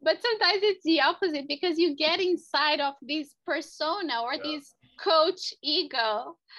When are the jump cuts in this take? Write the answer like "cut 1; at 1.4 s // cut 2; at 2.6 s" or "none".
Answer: cut 1; at 4.9 s